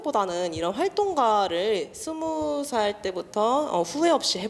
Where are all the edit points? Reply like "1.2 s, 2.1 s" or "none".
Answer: none